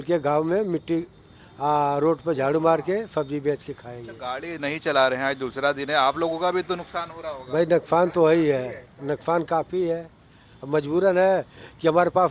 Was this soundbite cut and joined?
no; 0 cuts

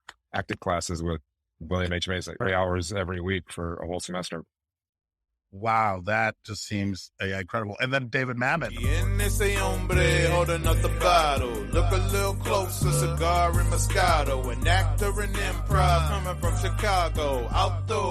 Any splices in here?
yes; 1 cut; at 8.7 s

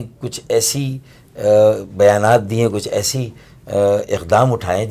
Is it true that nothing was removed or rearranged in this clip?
yes; 0 cuts

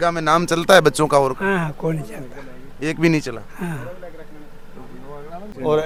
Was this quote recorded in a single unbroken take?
yes; 0 cuts

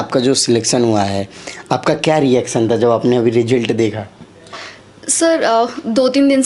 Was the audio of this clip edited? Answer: no; 0 cuts

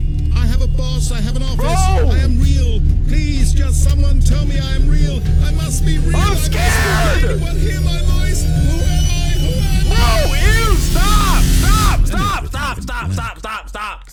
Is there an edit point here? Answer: no; 0 cuts

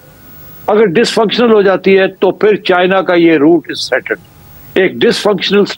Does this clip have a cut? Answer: no; 0 cuts

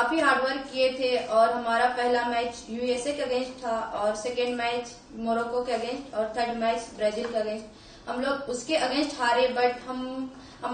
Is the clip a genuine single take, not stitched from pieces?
yes; 0 cuts

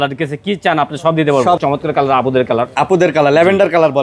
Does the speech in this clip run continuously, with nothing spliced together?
no; 1 cut; at 1.6 s

